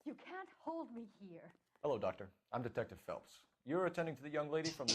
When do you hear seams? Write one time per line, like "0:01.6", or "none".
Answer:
0:01.8